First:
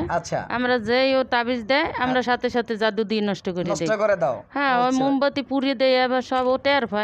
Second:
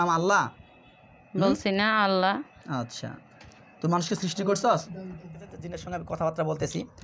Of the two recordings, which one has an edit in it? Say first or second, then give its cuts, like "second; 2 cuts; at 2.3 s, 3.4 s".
second; 1 cut; at 5.7 s